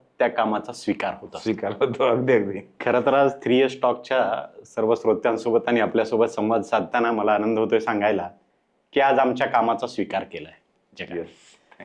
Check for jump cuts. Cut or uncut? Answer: uncut